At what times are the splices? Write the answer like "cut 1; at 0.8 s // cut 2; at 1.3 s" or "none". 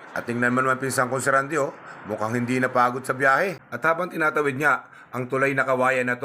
cut 1; at 3.7 s